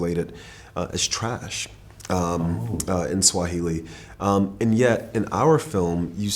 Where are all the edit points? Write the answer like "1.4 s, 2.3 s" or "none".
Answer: none